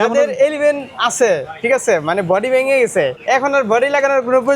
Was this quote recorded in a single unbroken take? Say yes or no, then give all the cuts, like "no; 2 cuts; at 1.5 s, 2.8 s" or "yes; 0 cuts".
no; 1 cut; at 3.2 s